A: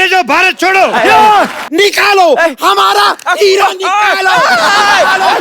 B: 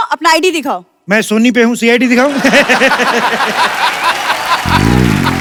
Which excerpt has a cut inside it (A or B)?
A